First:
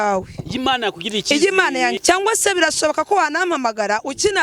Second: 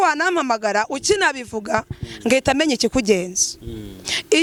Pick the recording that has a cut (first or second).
first